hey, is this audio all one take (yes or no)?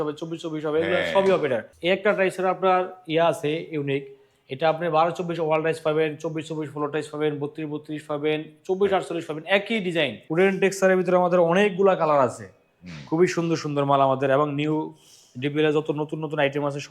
no